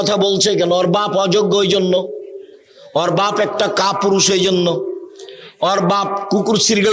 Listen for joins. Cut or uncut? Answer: uncut